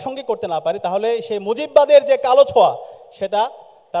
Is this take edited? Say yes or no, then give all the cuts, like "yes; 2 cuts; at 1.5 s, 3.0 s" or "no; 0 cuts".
no; 0 cuts